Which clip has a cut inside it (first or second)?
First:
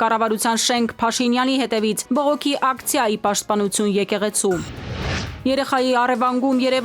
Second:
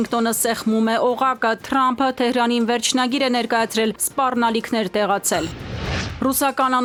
first